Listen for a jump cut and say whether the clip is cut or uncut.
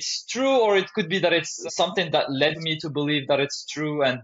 cut